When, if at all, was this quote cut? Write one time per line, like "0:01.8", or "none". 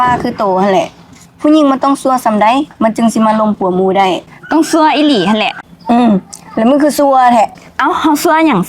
0:05.7

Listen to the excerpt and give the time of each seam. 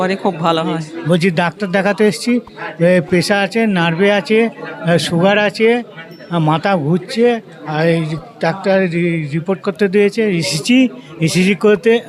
none

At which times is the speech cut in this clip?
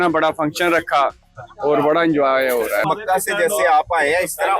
0:02.8

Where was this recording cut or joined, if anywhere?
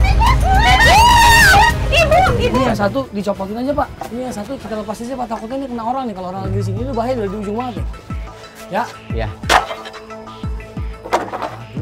0:02.5

